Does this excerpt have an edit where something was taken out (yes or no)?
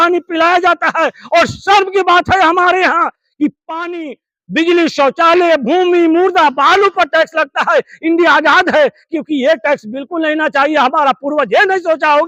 no